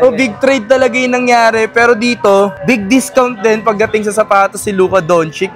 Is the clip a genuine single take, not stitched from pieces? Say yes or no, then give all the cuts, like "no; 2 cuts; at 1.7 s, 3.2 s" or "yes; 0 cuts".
yes; 0 cuts